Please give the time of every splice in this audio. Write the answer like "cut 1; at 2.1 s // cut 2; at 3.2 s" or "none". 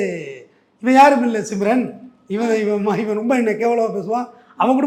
none